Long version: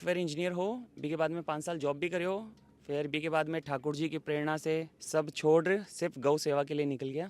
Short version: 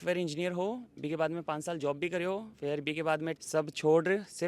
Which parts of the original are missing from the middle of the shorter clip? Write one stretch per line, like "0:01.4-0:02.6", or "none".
0:02.5-0:02.8
0:03.6-0:05.0